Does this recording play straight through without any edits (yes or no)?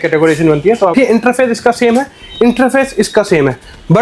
no